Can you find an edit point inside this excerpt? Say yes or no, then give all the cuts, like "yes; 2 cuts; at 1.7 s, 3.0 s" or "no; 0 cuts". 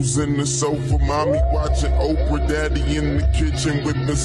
yes; 1 cut; at 1.2 s